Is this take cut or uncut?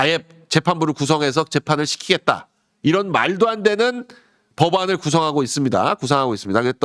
uncut